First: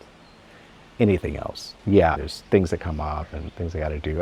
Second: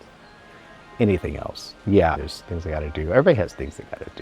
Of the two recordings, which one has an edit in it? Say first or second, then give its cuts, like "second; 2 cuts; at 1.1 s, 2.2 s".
second; 1 cut; at 2.3 s